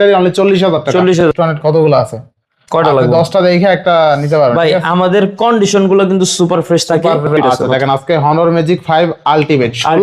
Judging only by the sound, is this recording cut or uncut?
cut